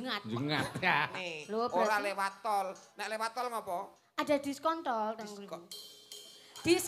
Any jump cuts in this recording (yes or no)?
yes